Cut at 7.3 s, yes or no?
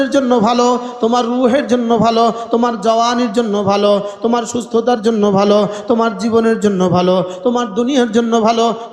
no